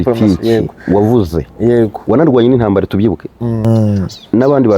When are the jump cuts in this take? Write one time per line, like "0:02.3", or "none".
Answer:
0:03.6